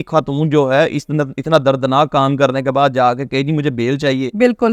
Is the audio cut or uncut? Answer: uncut